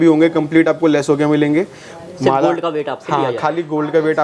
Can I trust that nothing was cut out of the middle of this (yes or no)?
yes